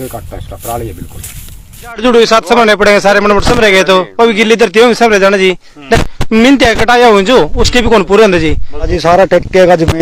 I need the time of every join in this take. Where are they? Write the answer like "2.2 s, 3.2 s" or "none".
2.0 s, 6.1 s, 8.9 s